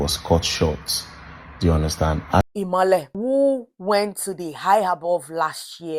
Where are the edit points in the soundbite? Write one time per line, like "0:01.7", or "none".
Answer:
0:02.7